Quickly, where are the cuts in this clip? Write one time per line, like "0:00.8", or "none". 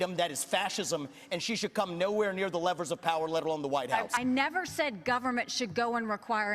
none